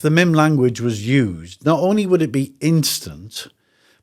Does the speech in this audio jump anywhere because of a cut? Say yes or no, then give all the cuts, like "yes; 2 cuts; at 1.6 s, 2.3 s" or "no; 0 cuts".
no; 0 cuts